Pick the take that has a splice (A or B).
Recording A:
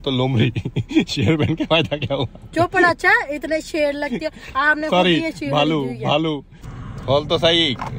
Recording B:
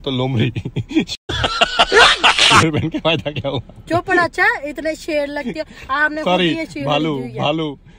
A